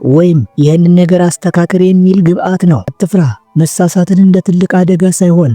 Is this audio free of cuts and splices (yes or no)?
no